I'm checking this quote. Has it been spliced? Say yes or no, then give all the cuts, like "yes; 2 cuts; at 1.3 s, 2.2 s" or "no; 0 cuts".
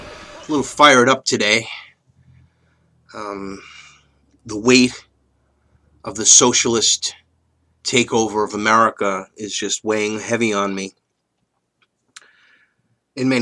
no; 0 cuts